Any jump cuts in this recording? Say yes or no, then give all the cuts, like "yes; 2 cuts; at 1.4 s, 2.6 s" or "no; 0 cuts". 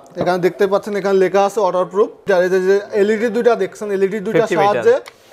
yes; 1 cut; at 2.2 s